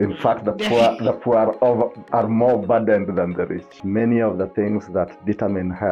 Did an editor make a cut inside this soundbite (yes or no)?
yes